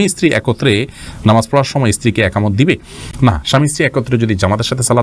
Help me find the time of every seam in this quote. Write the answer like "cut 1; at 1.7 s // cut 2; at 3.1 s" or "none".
none